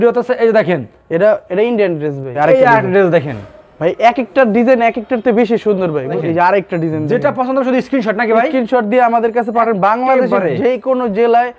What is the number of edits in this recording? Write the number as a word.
two